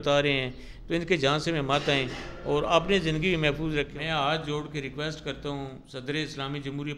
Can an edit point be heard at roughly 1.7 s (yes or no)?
no